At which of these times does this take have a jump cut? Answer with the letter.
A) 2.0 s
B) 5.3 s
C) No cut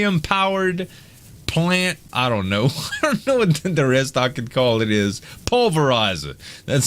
A